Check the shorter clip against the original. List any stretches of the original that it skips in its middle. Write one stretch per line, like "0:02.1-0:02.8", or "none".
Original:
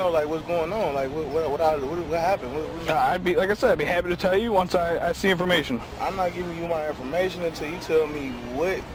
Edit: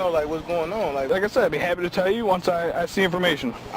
0:01.1-0:03.3